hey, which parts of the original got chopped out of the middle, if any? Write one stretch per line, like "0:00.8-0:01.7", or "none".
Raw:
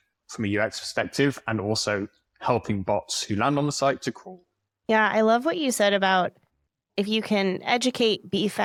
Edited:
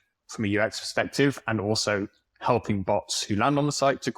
none